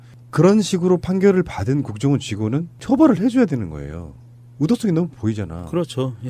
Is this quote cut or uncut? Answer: uncut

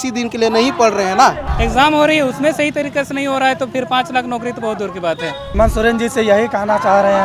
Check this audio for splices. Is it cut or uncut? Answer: cut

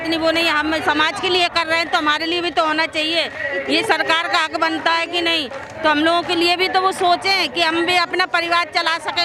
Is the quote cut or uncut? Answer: uncut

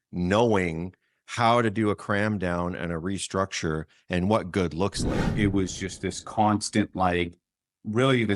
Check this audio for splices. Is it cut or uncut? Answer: cut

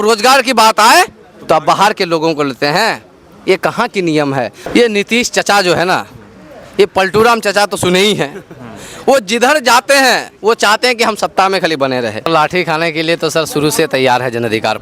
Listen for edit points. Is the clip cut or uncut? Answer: cut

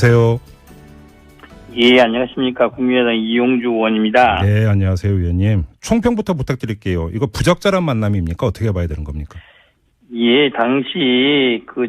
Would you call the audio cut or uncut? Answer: cut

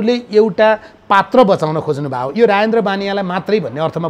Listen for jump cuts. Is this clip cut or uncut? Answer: uncut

